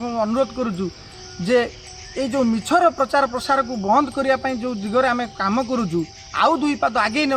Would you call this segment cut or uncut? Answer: uncut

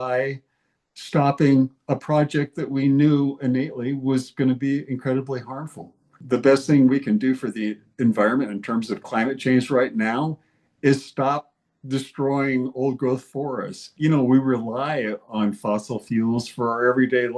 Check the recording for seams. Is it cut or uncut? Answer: cut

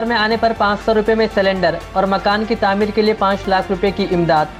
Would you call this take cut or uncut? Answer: uncut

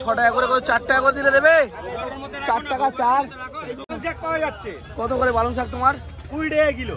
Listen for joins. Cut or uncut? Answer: cut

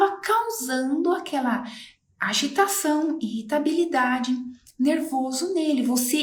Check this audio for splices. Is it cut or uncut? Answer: uncut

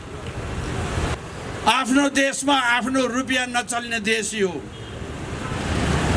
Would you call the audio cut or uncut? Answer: cut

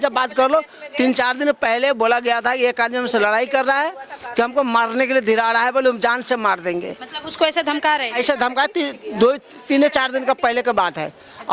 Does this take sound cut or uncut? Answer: uncut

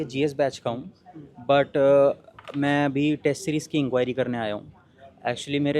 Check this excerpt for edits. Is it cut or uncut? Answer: uncut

